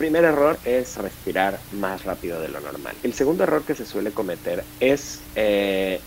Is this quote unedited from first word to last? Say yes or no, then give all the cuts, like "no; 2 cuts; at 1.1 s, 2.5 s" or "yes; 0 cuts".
no; 3 cuts; at 0.9 s, 2.9 s, 4.7 s